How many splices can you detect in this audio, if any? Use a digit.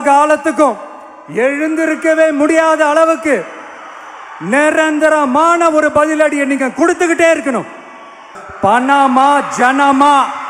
1